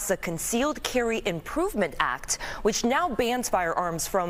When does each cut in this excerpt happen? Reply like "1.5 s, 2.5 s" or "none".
none

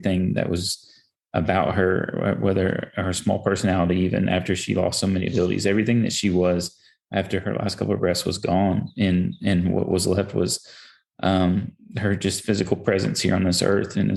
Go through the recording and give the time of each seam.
none

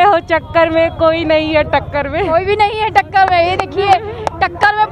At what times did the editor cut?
none

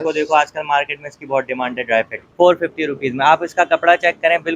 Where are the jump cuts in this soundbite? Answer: 2.1 s

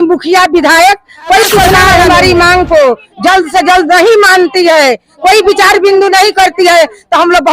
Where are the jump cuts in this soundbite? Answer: 1.7 s

